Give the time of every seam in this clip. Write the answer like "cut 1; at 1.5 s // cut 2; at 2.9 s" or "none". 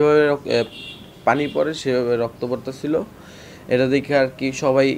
none